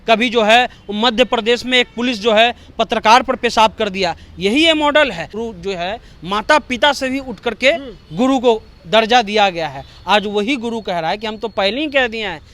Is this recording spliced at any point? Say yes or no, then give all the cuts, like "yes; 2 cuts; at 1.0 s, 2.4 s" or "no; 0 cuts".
yes; 1 cut; at 5.3 s